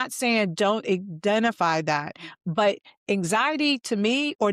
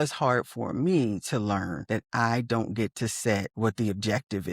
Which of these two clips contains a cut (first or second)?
second